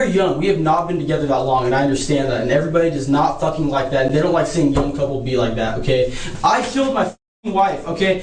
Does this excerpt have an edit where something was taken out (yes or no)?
yes